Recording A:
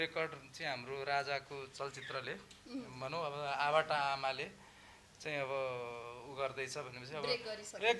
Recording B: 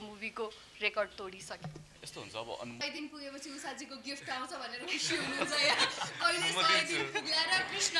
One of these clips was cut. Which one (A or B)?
B